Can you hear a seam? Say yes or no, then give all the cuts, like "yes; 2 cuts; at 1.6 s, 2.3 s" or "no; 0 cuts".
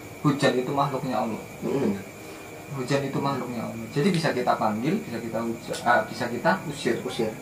no; 0 cuts